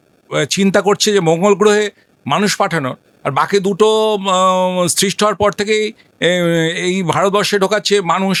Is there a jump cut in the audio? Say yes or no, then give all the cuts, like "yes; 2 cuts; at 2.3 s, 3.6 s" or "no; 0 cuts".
no; 0 cuts